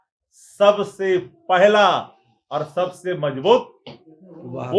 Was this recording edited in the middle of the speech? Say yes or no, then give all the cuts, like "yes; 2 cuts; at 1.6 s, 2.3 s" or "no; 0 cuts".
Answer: no; 0 cuts